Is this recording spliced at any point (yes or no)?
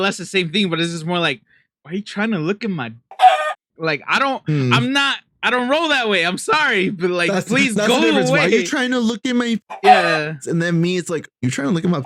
no